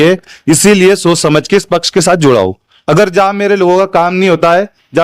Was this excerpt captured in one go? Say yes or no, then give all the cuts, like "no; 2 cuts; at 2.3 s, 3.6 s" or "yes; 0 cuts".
no; 1 cut; at 2.7 s